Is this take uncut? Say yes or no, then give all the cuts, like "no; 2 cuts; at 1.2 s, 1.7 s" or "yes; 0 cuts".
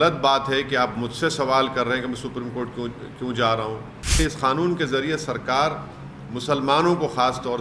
no; 1 cut; at 4.2 s